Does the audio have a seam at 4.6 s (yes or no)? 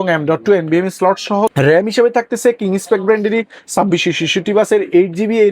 no